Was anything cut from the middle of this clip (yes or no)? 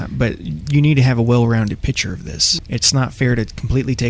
yes